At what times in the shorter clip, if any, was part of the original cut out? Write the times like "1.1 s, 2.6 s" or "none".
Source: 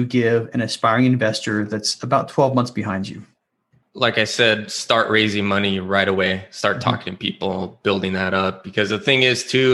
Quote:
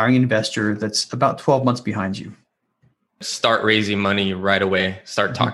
3.1 s